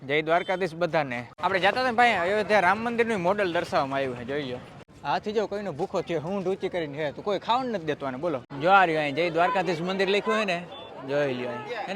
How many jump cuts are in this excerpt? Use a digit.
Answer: 3